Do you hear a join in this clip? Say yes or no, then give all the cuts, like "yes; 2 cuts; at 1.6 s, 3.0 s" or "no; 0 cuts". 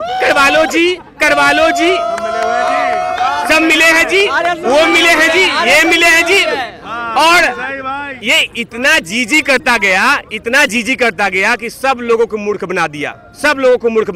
no; 0 cuts